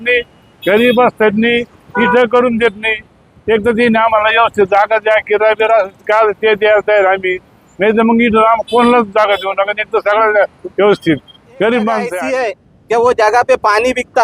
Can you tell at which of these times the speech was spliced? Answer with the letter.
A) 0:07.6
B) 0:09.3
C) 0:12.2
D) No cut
C